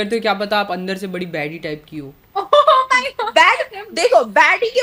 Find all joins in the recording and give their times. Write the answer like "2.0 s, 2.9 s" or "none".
none